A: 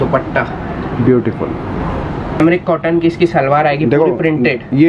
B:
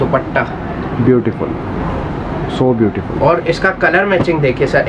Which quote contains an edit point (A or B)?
A